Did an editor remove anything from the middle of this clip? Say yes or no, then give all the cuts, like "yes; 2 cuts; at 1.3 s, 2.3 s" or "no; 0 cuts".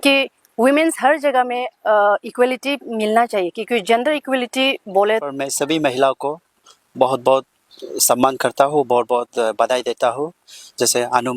yes; 1 cut; at 5.3 s